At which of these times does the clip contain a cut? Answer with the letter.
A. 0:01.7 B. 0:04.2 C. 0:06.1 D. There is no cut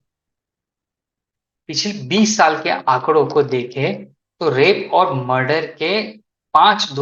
D